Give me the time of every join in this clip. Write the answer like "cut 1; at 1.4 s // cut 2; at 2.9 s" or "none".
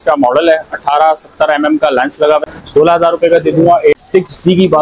cut 1; at 2.4 s // cut 2; at 3.9 s